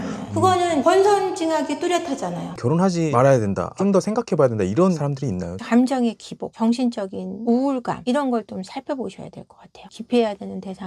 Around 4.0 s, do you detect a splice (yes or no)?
no